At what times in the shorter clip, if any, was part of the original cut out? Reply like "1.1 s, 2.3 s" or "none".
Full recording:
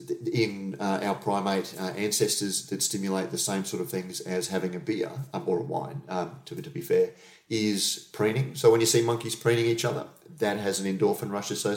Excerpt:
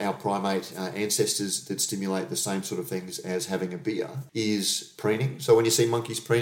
4.2 s